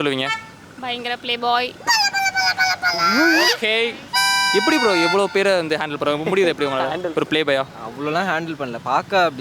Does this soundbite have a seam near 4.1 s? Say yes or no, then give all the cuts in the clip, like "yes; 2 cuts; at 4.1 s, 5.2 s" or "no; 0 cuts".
yes; 1 cut; at 4.1 s